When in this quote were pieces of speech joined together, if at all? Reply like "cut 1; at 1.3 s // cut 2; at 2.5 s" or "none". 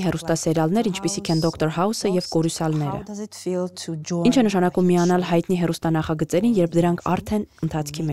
none